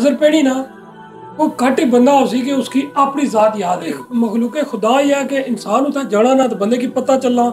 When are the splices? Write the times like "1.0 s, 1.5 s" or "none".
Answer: 3.9 s